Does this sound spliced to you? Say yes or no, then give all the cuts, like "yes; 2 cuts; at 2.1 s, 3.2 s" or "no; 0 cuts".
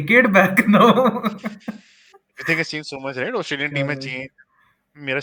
no; 0 cuts